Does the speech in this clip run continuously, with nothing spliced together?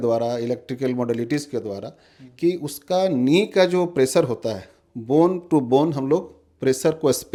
yes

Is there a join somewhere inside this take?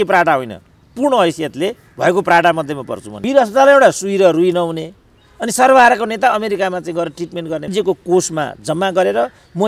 yes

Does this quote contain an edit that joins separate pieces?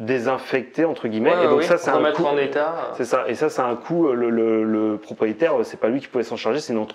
no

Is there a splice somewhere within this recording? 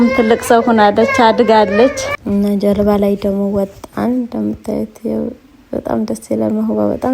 yes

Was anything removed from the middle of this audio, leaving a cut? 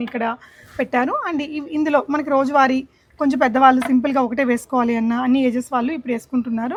no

